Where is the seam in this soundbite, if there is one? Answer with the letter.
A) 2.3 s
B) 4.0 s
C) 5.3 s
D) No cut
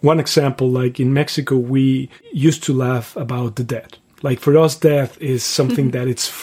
A